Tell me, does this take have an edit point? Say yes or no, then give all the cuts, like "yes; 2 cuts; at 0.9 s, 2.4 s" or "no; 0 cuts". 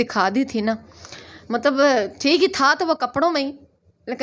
no; 0 cuts